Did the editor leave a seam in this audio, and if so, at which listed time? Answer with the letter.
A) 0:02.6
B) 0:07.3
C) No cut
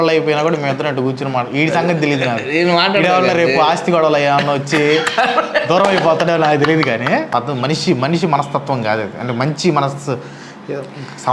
B